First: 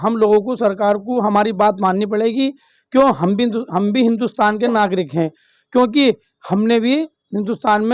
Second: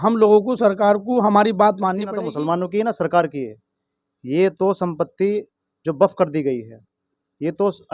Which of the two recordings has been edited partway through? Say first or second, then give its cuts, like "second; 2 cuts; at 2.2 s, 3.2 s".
second; 1 cut; at 2.1 s